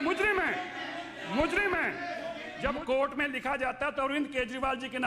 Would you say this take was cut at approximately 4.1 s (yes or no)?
no